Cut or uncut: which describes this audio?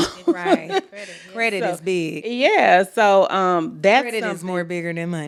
uncut